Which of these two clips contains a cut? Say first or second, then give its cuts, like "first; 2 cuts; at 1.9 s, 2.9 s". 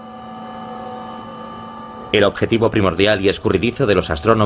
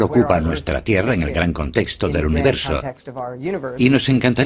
second; 1 cut; at 2.5 s